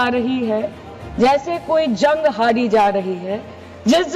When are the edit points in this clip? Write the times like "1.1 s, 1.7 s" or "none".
none

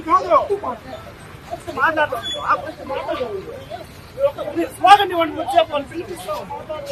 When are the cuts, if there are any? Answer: 3.5 s

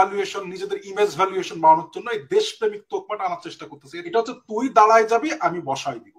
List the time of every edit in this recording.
4.1 s

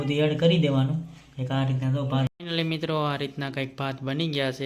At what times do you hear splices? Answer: 2.3 s

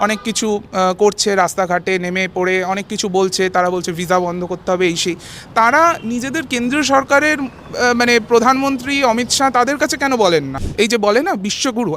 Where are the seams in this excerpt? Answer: 10.6 s

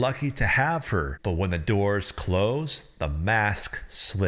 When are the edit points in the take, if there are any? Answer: 1.1 s

